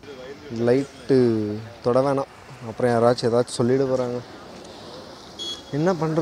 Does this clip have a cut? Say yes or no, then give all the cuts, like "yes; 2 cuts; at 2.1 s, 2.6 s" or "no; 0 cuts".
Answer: no; 0 cuts